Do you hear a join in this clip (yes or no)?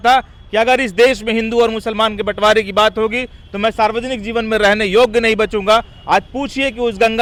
no